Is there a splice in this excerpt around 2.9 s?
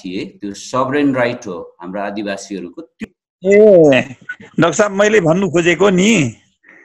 yes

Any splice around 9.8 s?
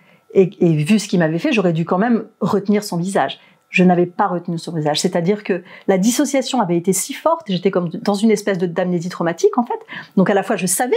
no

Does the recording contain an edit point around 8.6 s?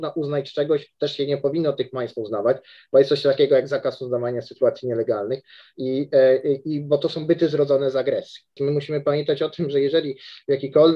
yes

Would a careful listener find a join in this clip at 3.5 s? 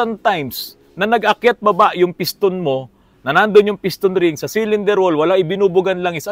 no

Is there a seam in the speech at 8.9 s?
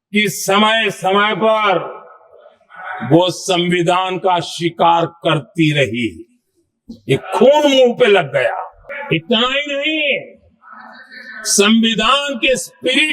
yes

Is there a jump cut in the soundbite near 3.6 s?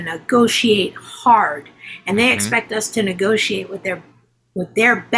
no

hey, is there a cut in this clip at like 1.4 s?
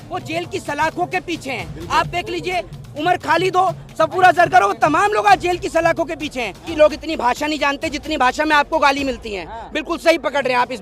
no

